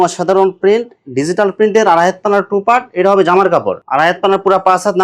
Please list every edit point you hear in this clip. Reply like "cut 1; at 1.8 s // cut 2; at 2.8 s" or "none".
cut 1; at 3.8 s